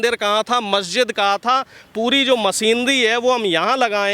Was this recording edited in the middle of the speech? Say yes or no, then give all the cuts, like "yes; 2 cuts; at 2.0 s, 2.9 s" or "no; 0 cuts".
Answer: no; 0 cuts